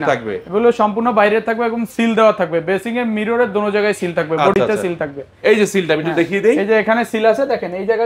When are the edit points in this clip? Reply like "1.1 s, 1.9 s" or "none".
none